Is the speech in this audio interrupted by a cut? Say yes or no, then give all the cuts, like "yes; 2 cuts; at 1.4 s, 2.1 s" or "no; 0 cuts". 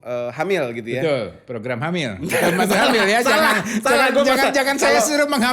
no; 0 cuts